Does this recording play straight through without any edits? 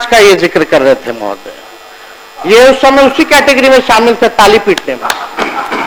yes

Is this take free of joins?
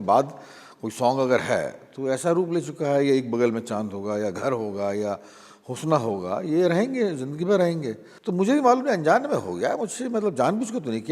yes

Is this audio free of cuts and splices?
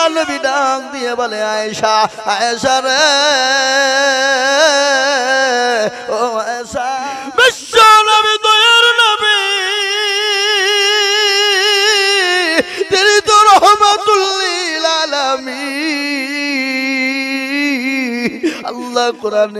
no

